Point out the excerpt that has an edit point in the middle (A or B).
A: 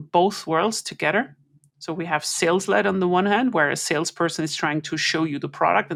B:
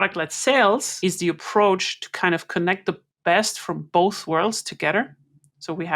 B